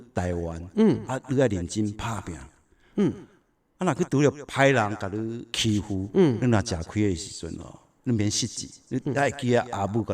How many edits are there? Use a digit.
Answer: 1